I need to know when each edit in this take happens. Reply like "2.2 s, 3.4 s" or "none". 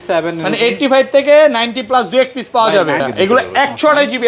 3.0 s